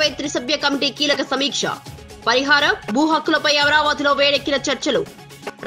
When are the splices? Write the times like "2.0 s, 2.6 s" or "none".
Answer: none